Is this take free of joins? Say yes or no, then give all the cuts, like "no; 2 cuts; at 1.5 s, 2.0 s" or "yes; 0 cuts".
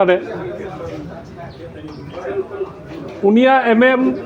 yes; 0 cuts